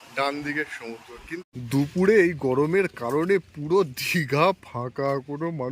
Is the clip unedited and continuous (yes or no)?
no